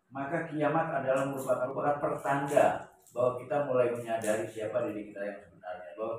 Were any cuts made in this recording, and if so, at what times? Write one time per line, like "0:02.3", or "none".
0:01.7